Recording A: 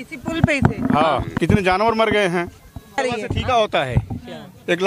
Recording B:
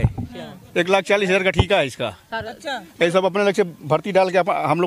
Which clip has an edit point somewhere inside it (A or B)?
A